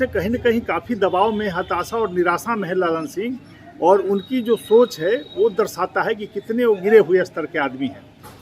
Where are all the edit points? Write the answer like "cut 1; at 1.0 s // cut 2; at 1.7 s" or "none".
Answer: none